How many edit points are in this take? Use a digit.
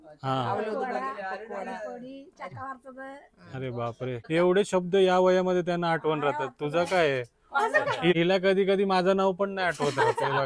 2